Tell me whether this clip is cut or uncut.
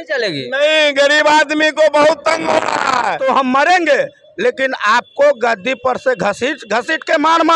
cut